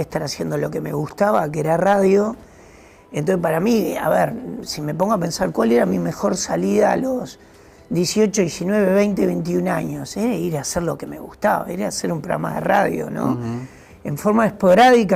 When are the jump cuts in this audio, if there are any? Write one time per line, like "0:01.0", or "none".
none